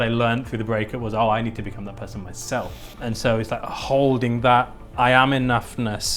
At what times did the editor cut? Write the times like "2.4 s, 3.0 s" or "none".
3.0 s